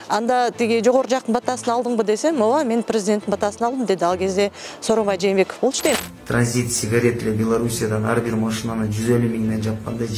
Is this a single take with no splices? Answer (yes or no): no